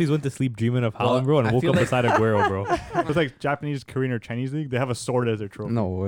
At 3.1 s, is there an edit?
yes; 1 cut; at 3.1 s

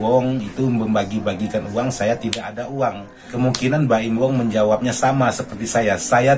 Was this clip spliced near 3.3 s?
yes; 1 cut; at 3.3 s

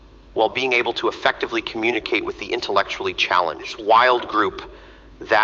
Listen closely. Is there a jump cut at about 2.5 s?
no; 1 cut; at 3.8 s

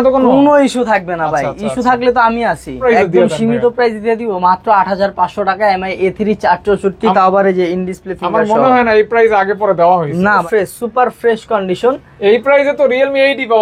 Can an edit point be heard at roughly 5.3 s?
no; 2 cuts; at 2.8 s, 10.4 s

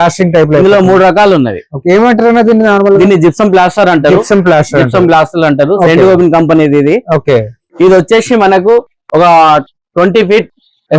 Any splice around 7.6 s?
yes; 1 cut; at 7.6 s

